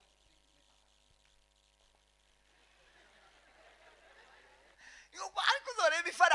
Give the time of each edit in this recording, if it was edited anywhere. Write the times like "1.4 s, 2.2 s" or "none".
4.8 s